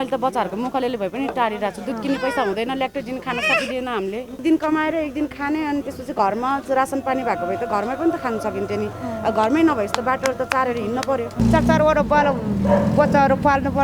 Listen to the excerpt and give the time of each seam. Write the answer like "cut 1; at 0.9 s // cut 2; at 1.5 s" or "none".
cut 1; at 4.4 s // cut 2; at 11.4 s